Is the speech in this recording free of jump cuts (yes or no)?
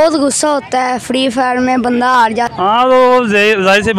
no